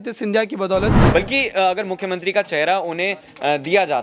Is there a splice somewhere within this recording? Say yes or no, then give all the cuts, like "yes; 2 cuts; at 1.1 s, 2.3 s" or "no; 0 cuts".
yes; 1 cut; at 1.1 s